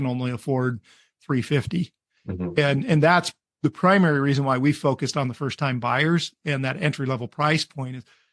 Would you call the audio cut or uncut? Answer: cut